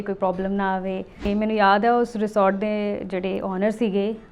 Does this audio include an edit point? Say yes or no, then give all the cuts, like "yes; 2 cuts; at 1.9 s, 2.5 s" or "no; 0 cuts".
yes; 1 cut; at 1.3 s